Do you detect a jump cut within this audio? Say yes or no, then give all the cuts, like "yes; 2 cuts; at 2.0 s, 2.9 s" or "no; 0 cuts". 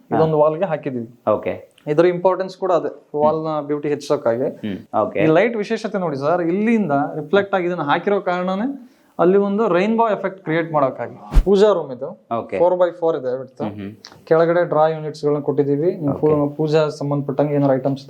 yes; 2 cuts; at 4.8 s, 11.3 s